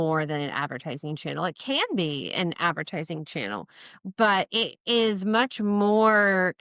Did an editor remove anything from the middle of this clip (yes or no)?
no